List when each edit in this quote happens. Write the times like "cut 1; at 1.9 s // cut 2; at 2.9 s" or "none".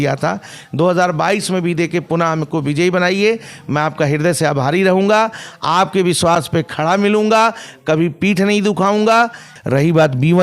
cut 1; at 9.5 s

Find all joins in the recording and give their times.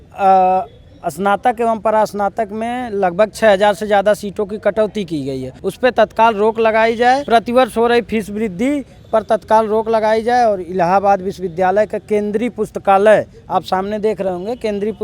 cut 1; at 5.5 s // cut 2; at 7.2 s

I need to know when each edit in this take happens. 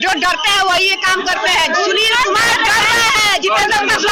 none

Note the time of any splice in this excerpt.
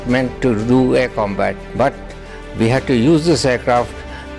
none

